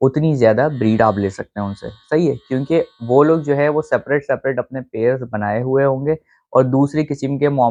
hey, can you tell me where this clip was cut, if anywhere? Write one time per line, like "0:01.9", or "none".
none